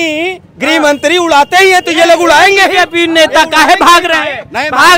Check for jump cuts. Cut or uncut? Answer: uncut